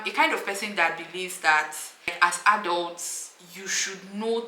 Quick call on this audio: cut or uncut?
cut